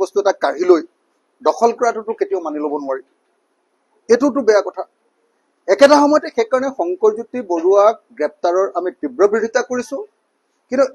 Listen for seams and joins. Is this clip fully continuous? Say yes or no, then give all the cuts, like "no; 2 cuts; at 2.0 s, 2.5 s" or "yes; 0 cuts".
yes; 0 cuts